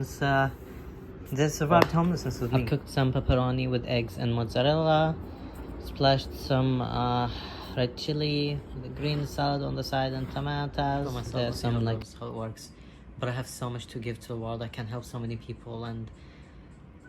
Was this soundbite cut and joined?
yes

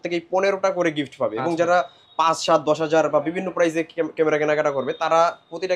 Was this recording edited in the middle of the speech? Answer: no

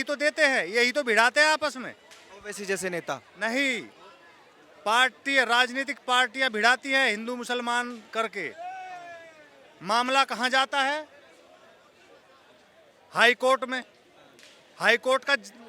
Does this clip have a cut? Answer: no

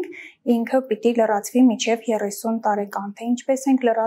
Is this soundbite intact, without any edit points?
yes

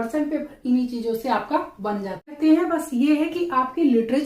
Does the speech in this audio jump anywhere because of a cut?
yes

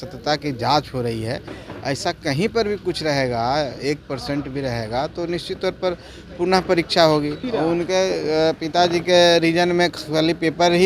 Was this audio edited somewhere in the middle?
yes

